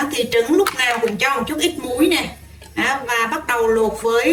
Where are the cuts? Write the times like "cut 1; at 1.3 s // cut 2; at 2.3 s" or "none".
none